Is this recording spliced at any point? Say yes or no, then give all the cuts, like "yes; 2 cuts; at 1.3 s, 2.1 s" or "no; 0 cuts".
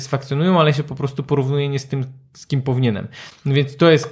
no; 0 cuts